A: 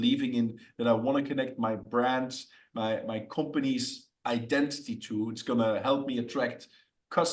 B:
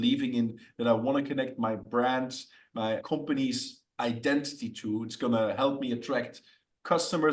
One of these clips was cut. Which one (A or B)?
B